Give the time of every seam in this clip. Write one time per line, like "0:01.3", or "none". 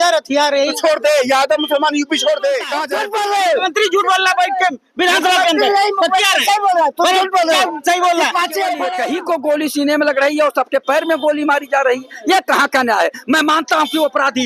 0:02.8
0:08.9